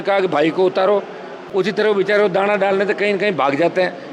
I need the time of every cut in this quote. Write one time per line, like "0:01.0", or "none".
0:01.4